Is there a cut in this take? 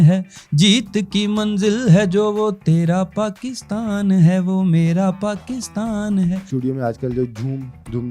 yes; 1 cut; at 6.5 s

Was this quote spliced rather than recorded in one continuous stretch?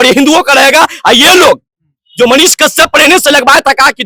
no; 0 cuts

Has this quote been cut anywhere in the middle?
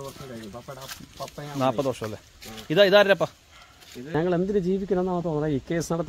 yes; 1 cut; at 4.1 s

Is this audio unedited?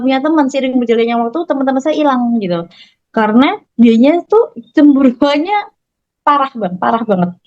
yes; 0 cuts

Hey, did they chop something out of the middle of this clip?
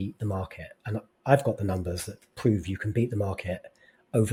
no; 0 cuts

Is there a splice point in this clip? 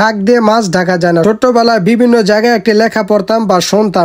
yes; 1 cut; at 1.2 s

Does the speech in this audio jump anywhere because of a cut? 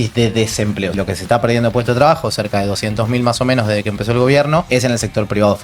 yes; 2 cuts; at 0.9 s, 4.7 s

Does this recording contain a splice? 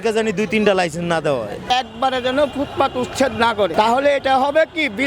yes; 2 cuts; at 1.7 s, 3.7 s

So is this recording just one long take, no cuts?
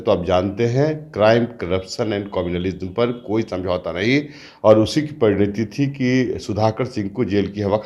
yes; 0 cuts

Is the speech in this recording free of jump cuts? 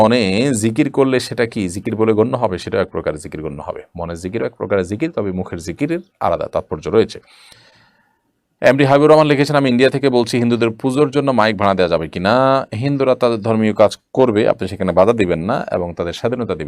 yes; 0 cuts

